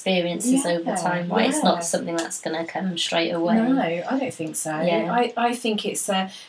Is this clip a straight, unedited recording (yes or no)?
yes